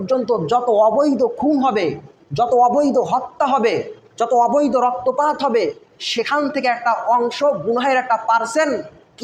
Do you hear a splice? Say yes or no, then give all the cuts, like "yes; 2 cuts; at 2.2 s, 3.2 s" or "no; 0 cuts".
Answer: no; 0 cuts